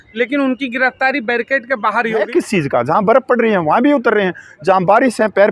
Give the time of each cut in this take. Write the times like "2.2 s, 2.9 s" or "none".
2.3 s